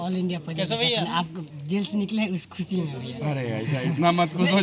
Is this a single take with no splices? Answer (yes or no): yes